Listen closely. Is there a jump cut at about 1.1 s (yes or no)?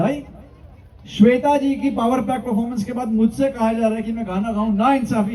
no